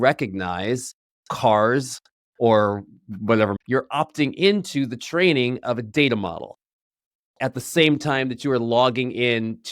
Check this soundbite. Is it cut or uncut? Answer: cut